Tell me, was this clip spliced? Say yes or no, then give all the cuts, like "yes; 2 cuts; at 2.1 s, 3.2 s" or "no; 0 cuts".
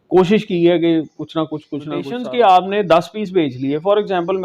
yes; 1 cut; at 2.1 s